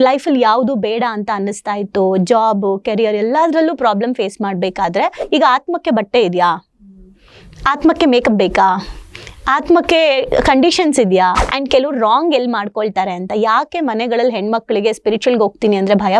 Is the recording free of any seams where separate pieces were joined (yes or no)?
no